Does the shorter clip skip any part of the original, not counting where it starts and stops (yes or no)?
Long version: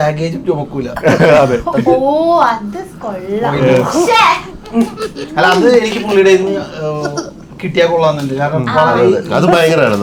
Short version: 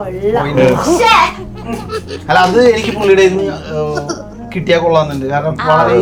no